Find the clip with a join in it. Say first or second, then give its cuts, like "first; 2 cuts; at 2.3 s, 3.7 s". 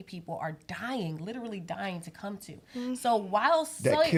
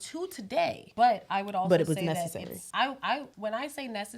second; 3 cuts; at 0.8 s, 2.6 s, 3.3 s